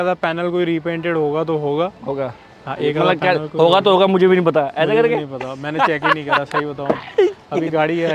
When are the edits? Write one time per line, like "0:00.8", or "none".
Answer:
none

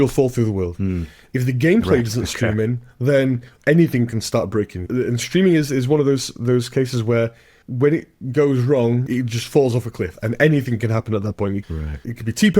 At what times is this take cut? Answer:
0:09.0

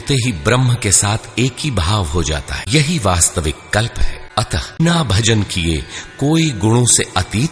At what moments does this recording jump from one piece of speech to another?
0:02.6
0:04.8

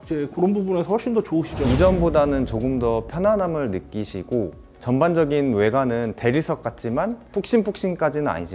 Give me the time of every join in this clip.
0:01.6
0:07.2

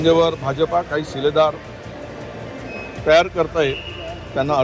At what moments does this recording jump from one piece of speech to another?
none

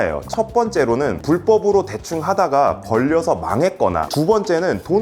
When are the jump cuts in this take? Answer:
0:01.2
0:04.1

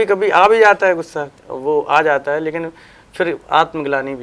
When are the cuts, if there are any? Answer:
0:01.2

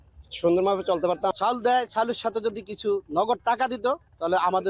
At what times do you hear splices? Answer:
0:01.3

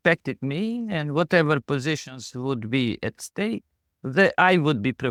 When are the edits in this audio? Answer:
none

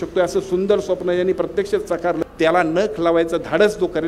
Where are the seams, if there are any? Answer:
0:02.2

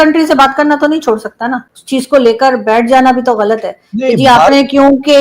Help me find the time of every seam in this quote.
0:01.7

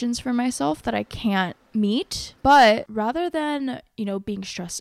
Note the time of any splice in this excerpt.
0:01.6
0:02.9

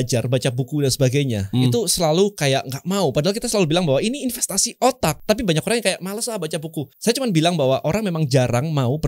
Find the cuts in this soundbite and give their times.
0:05.2
0:06.9

